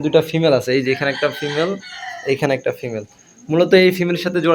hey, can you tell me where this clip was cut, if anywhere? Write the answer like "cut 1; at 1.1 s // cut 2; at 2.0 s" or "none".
none